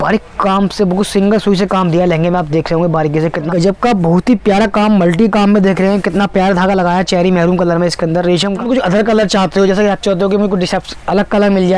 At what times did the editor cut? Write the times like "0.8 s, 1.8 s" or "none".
3.5 s, 8.5 s

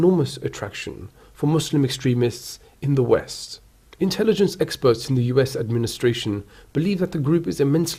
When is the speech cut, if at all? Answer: none

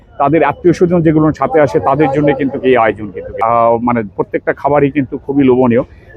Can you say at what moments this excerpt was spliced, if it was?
3.3 s

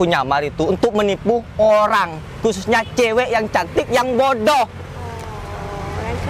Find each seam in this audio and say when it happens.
none

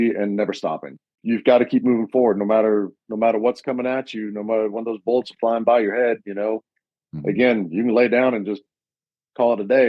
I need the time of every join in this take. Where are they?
1.2 s

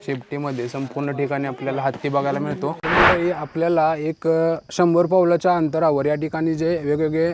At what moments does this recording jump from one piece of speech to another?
2.8 s

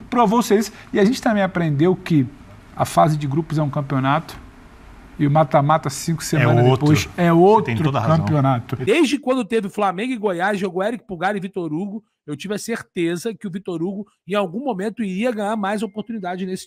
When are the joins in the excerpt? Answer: 8.7 s

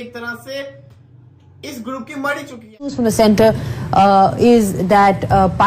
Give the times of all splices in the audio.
3.0 s

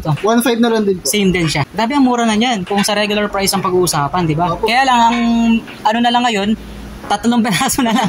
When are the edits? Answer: 1.6 s

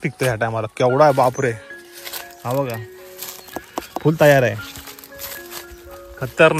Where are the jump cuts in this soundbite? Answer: none

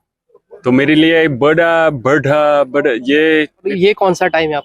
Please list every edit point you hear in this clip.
3.7 s

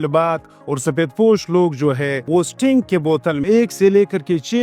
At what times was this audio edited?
2.2 s, 3.4 s

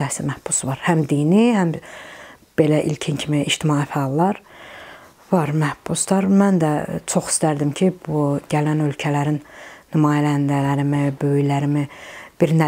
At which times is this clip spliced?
none

